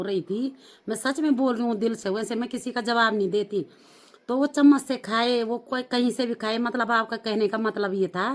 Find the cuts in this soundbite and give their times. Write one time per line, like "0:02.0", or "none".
none